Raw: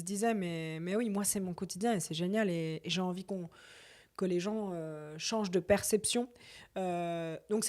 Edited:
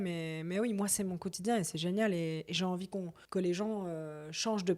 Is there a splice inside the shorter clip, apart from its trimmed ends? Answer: yes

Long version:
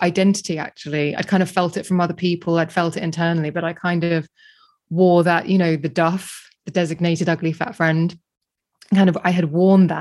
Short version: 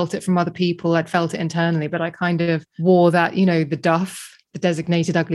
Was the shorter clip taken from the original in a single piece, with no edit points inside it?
no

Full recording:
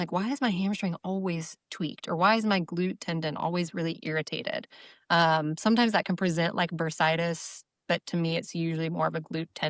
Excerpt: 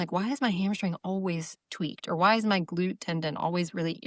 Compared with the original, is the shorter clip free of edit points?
yes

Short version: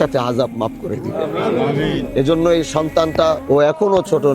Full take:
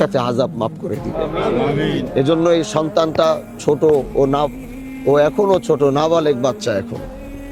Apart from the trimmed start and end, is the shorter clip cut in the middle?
yes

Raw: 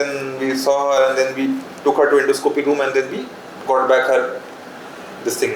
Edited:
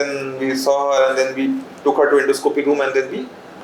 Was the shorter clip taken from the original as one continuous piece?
yes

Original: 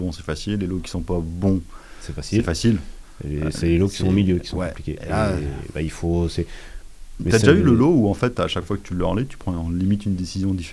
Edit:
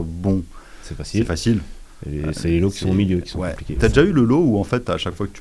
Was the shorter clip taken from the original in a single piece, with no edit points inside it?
no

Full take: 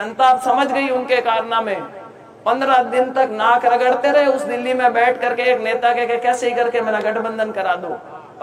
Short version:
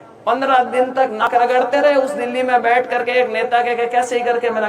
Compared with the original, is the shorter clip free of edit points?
no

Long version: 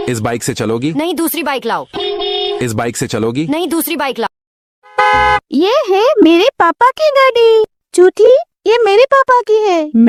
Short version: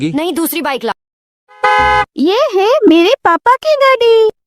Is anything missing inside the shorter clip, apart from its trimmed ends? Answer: yes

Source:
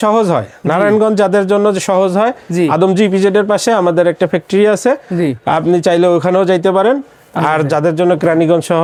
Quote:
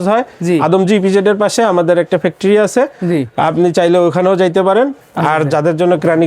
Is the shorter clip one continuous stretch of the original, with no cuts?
no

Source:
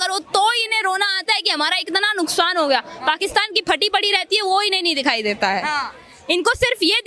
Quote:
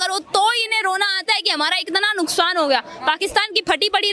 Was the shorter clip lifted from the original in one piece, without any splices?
yes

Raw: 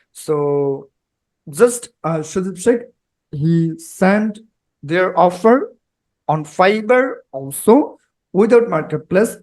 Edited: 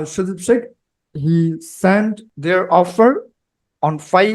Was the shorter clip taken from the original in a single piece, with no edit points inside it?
no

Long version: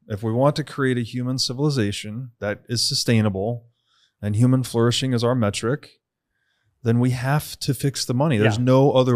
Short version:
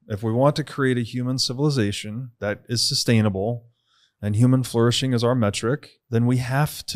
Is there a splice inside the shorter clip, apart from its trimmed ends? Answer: yes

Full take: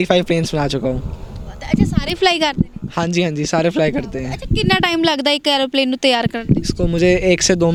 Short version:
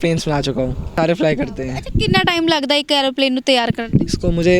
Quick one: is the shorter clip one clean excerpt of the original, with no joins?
no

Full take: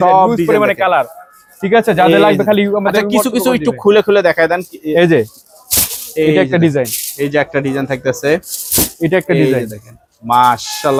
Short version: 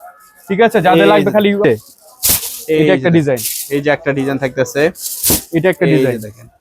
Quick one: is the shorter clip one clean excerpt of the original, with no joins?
no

